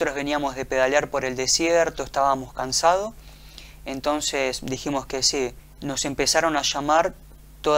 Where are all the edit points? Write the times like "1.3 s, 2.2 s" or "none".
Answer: 5.7 s